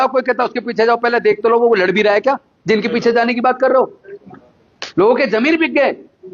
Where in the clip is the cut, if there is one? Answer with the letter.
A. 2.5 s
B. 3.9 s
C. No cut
C